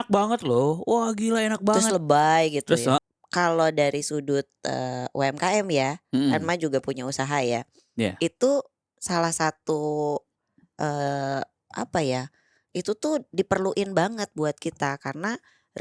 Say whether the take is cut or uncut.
cut